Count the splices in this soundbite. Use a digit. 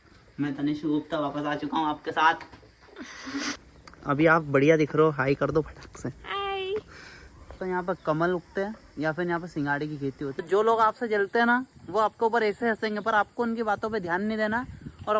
3